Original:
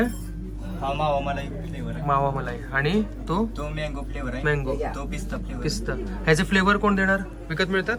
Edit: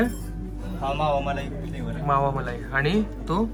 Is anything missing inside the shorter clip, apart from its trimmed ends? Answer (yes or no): no